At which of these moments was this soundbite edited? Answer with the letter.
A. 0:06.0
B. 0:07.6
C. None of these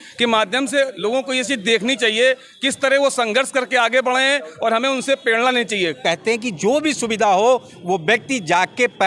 A